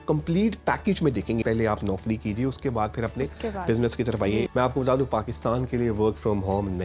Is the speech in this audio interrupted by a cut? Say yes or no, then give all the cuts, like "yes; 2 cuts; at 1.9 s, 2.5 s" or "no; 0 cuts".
yes; 2 cuts; at 1.4 s, 4.5 s